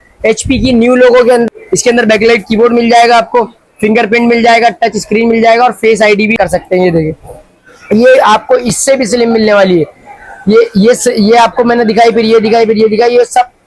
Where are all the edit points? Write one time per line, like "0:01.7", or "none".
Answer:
0:01.5
0:06.3